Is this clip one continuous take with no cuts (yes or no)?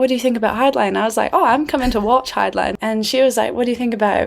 no